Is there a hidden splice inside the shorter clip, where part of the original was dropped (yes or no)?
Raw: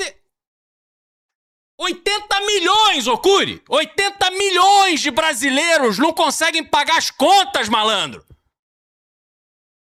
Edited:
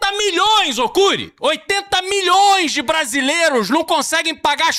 no